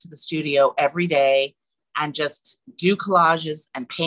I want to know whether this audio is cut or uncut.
uncut